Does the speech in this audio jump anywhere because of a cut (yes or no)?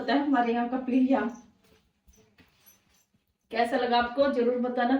no